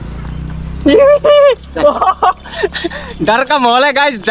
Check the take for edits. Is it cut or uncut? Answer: uncut